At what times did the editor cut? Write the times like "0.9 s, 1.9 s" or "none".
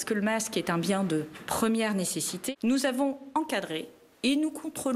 2.3 s